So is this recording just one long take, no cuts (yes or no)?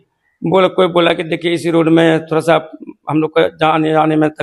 yes